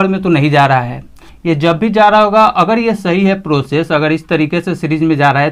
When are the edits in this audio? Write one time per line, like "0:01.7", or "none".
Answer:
none